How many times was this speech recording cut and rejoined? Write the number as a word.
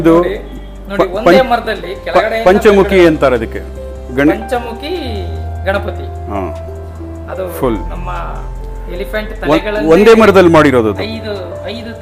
zero